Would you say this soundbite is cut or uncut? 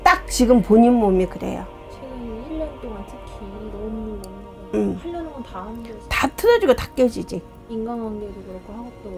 uncut